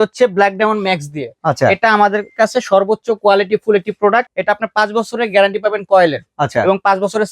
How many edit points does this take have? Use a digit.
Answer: 1